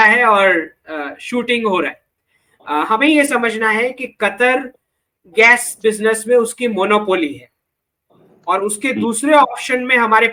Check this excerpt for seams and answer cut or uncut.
uncut